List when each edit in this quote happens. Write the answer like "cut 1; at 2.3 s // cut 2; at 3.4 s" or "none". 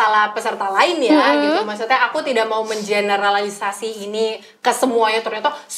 none